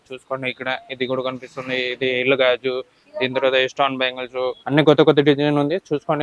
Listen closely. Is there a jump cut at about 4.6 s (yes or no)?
yes